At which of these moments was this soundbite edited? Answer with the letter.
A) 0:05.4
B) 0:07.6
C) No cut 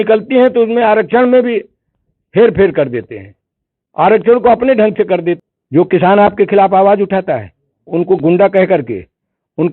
A